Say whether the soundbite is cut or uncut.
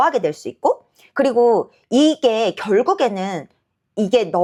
uncut